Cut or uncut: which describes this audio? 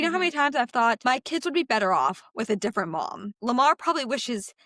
cut